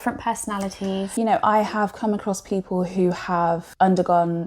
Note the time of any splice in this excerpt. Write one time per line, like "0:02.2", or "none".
0:01.1
0:03.7